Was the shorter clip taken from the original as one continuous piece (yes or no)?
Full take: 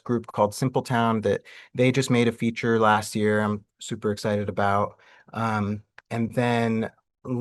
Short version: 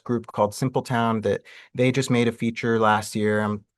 yes